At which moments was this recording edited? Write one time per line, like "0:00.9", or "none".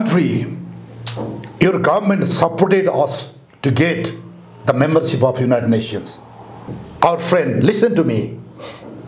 0:06.8